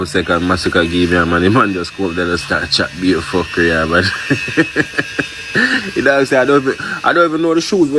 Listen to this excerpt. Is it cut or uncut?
uncut